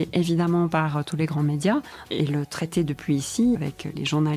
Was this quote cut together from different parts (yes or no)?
yes